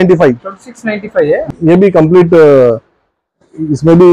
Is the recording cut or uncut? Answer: cut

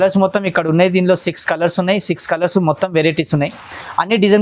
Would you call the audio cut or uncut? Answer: uncut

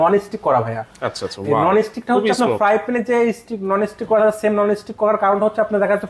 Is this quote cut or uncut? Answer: uncut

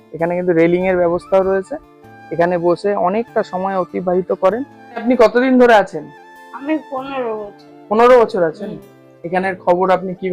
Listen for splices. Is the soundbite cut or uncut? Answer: cut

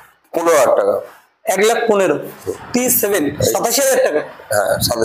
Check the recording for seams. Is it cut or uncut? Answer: cut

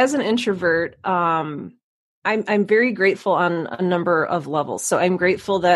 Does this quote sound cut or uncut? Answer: uncut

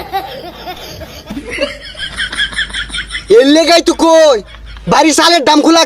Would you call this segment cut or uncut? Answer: cut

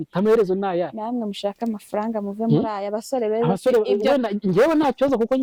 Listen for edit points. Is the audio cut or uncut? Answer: uncut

